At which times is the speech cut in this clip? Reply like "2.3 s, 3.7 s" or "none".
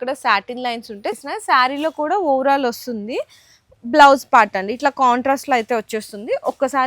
1.2 s